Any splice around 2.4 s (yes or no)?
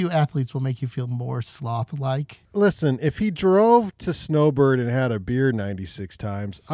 yes